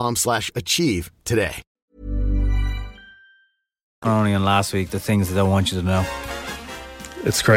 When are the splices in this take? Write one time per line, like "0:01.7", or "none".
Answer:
none